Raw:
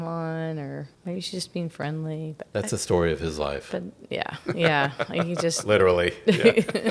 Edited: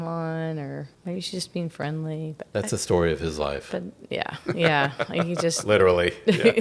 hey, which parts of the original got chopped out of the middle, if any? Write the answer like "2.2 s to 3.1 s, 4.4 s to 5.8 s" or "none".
none